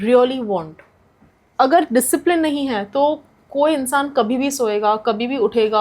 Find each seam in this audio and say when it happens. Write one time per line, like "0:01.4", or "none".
0:01.2